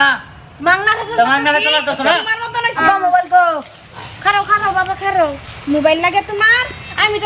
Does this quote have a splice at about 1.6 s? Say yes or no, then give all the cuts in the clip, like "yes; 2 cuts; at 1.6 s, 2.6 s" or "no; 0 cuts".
no; 1 cut; at 2.8 s